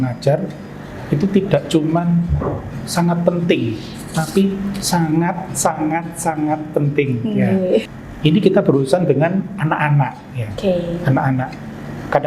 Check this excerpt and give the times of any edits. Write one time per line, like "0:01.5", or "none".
0:07.8